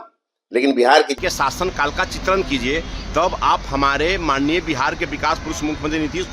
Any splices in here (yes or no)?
yes